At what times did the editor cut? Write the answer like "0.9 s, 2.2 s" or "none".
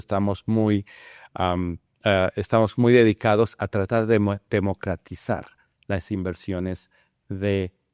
none